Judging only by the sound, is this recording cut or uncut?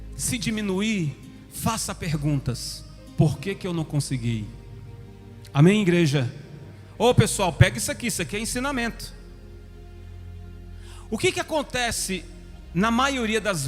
uncut